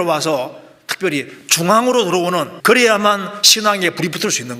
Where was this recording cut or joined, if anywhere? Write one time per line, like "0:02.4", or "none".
0:02.5